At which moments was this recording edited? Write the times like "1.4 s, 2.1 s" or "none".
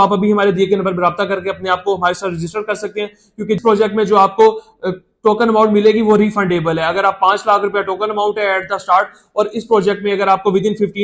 3.6 s